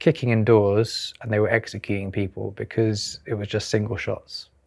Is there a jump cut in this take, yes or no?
no